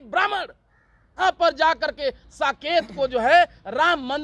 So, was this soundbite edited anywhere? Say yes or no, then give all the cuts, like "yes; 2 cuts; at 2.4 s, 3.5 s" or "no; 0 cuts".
yes; 1 cut; at 1.2 s